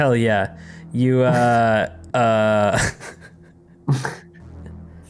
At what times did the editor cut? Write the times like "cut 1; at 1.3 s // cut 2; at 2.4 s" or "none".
cut 1; at 2.0 s